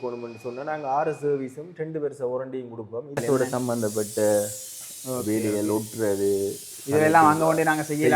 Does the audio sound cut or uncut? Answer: cut